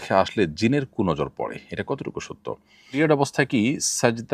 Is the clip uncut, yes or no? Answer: no